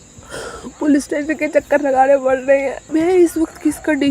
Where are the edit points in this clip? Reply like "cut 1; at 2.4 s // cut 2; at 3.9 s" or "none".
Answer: cut 1; at 2.8 s

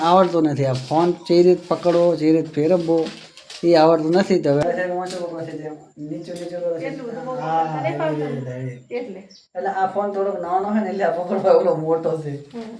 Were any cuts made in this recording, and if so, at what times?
cut 1; at 4.6 s

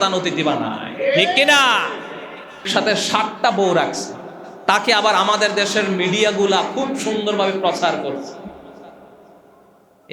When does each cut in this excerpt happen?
cut 1; at 2.7 s

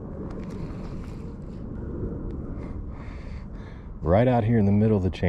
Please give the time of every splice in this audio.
cut 1; at 1.8 s

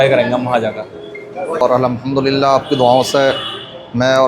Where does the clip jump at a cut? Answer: cut 1; at 1.4 s

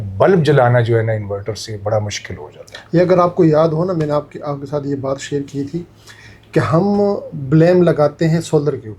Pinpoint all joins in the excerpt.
none

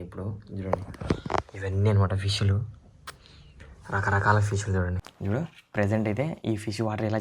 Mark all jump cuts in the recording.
cut 1; at 5.1 s

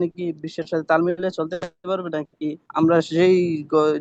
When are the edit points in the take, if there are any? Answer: cut 1; at 2.6 s

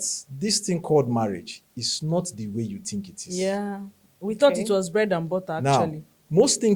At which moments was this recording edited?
none

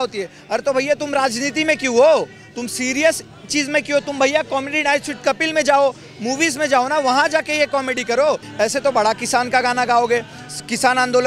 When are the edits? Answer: cut 1; at 8.5 s

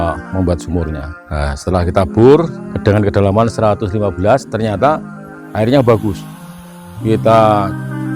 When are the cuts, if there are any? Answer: cut 1; at 1.1 s // cut 2; at 2.6 s

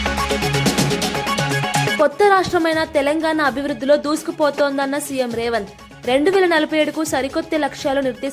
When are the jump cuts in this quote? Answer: none

